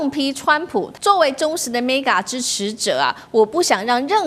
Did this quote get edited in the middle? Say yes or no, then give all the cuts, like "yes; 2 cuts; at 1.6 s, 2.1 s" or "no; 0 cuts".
yes; 1 cut; at 0.9 s